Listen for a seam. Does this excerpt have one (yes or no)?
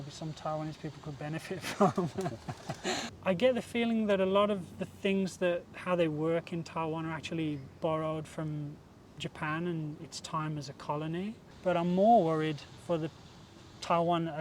yes